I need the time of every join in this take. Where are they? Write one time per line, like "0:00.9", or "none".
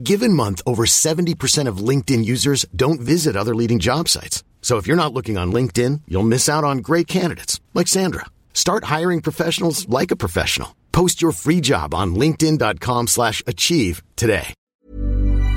0:14.6